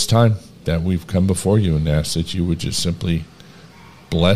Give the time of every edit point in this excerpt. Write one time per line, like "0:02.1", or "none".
none

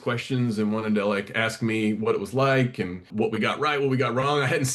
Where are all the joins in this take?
0:03.1

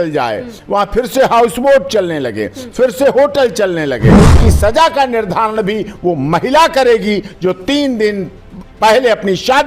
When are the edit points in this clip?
0:04.1

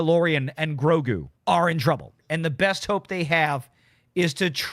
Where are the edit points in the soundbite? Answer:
0:01.3
0:02.2

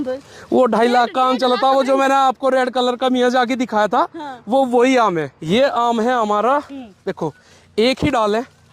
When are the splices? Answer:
0:05.3

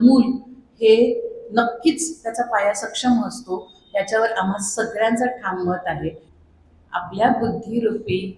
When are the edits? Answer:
0:06.3

